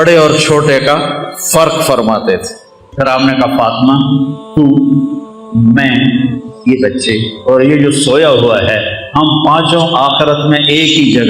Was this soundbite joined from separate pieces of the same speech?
yes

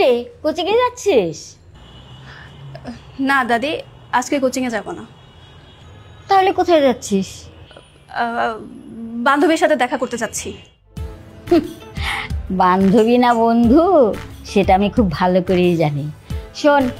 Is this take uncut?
yes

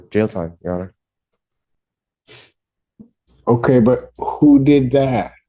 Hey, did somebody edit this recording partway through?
no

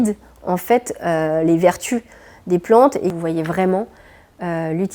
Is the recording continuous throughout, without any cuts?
no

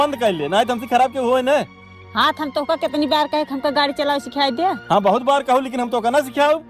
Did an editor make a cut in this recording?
no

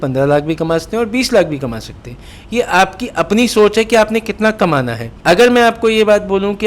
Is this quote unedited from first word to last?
yes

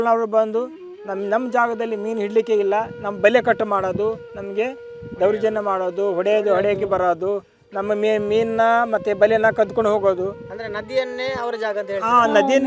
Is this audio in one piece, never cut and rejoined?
yes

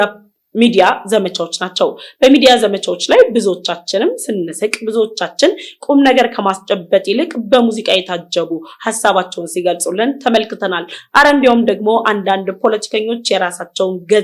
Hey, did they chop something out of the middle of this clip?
no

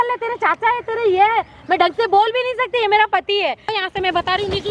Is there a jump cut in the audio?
yes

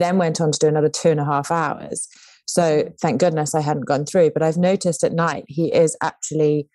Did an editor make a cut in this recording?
no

